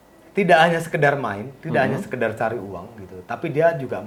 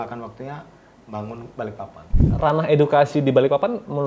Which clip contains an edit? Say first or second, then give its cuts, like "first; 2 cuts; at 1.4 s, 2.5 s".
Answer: second; 1 cut; at 2.2 s